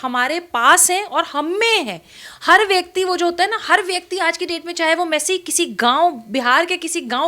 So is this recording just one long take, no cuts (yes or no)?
yes